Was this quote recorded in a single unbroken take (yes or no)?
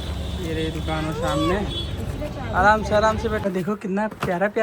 no